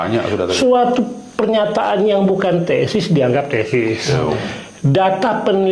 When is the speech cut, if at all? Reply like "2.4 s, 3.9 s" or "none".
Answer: none